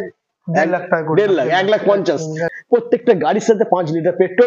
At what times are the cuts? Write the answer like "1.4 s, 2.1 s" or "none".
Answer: 2.5 s